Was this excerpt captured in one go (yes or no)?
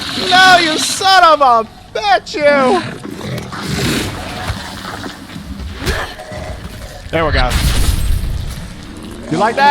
no